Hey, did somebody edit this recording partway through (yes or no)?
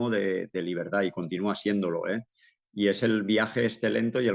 no